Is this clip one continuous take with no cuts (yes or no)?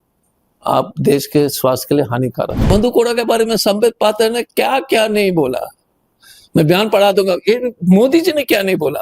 no